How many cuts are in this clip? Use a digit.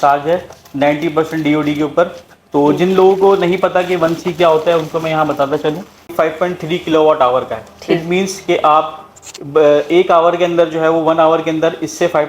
1